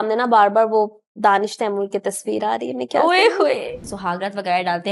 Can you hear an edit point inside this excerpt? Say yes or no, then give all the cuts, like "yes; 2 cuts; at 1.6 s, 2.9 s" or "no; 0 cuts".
yes; 1 cut; at 3.8 s